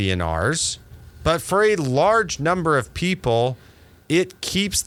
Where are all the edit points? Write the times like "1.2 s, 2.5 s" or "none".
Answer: none